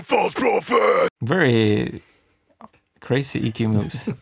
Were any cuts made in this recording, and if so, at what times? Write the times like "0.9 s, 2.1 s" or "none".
none

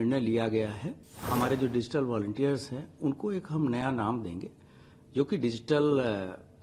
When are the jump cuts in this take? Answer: 1.2 s

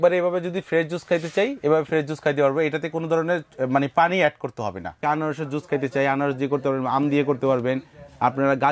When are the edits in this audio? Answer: 5.0 s

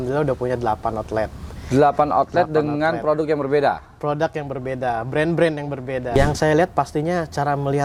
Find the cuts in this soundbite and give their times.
6.1 s

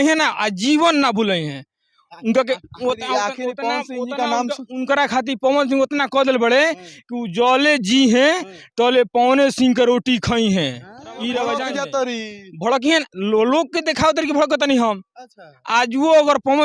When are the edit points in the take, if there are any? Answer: 11.6 s

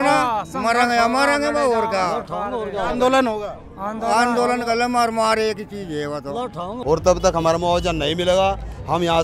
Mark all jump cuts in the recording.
6.7 s

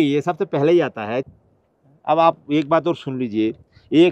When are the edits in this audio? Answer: 1.2 s

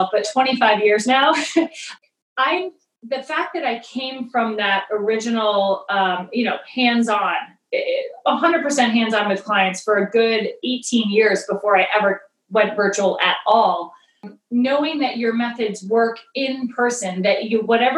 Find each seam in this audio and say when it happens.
1.8 s, 14.3 s

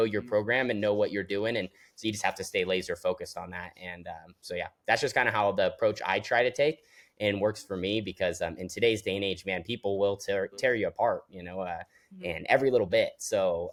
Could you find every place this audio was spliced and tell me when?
none

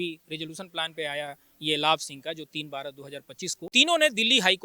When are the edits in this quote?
3.7 s

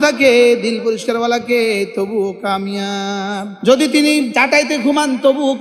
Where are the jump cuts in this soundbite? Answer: 3.5 s, 4.3 s

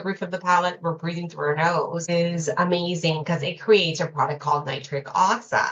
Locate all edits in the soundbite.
2.0 s

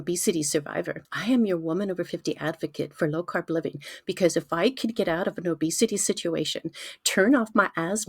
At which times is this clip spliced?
1.0 s

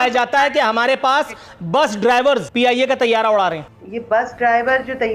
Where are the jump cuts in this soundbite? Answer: 2.5 s

